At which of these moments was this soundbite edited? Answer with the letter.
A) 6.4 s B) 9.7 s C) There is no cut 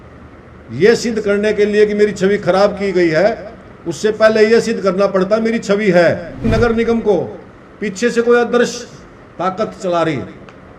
A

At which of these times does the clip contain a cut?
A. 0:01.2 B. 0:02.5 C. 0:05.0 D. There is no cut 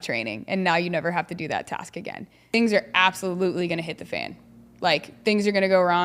B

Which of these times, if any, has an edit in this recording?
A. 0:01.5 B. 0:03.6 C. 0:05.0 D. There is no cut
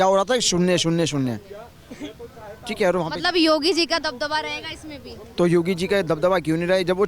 D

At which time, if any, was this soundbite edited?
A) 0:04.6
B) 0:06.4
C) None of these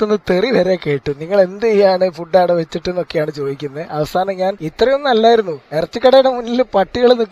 A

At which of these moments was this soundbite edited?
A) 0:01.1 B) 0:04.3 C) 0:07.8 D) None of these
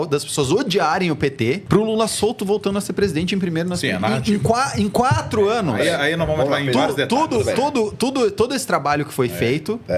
D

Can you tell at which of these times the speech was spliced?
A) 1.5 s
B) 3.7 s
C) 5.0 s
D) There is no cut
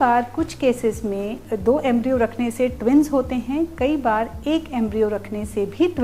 A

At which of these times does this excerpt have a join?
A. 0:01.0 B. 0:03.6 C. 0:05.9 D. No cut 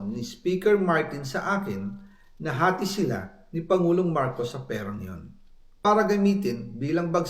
C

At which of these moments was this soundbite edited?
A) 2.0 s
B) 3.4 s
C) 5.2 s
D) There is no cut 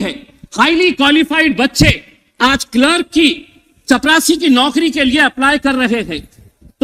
D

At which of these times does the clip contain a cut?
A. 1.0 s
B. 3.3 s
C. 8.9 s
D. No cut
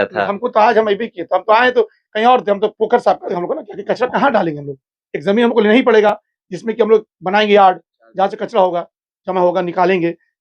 B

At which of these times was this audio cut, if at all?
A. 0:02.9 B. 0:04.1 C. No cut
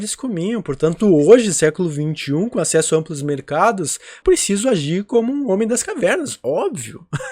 B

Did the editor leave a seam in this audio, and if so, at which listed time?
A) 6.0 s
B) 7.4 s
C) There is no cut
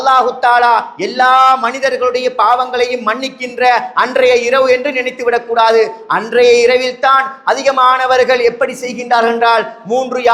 C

